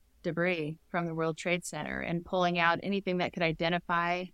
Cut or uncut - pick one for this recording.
uncut